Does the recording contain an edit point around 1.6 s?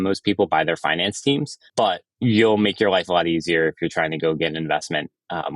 yes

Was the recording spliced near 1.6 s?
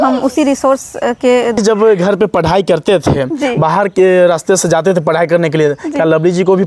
yes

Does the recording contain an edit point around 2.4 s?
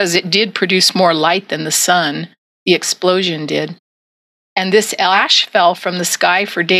no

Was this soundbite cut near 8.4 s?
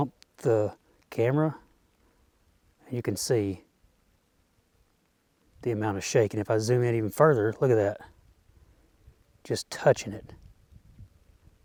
no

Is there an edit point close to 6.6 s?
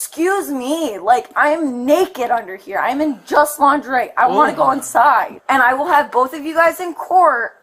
no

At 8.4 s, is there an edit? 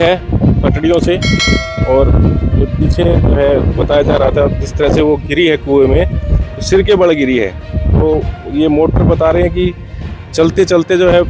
no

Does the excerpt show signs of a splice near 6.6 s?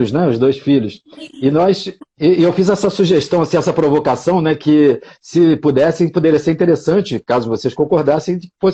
no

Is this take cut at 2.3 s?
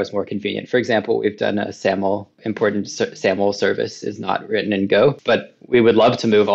yes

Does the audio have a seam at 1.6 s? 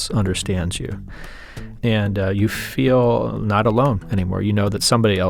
yes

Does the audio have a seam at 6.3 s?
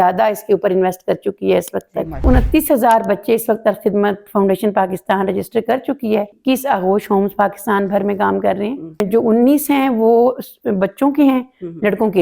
yes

